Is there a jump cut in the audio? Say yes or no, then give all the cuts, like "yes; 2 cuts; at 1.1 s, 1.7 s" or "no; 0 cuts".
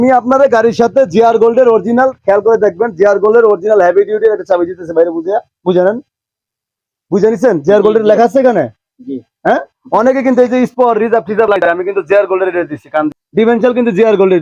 yes; 1 cut; at 13.2 s